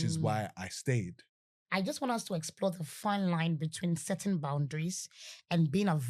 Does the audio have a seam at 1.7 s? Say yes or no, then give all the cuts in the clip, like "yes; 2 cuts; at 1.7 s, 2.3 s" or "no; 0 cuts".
yes; 1 cut; at 1.7 s